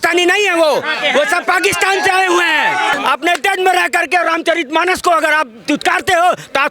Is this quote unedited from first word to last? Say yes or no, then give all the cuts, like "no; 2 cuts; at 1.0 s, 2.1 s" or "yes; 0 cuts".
no; 1 cut; at 2.9 s